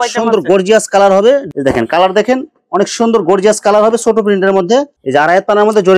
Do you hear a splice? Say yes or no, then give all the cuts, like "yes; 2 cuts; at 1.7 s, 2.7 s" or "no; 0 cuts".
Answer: yes; 2 cuts; at 1.5 s, 5.0 s